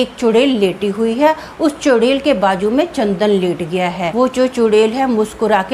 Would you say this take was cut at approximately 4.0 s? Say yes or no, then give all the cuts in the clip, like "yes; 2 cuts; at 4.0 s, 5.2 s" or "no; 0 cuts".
yes; 1 cut; at 4.0 s